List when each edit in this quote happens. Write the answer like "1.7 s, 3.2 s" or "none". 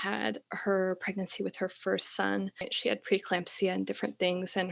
2.7 s